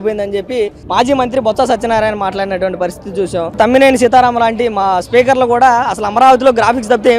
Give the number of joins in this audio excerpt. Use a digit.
1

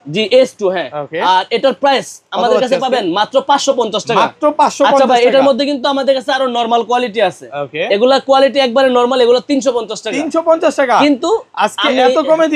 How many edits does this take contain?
0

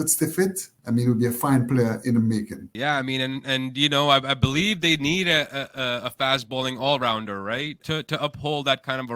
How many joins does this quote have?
0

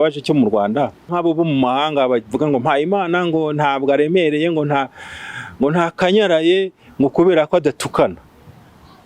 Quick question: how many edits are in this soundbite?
1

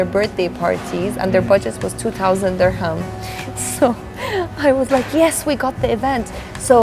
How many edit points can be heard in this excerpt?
0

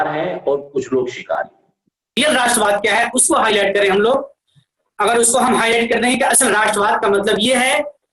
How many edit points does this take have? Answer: 1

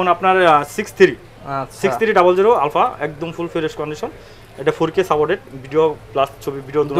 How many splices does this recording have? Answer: 0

